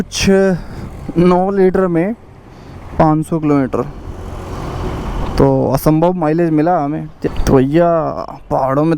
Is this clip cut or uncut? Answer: cut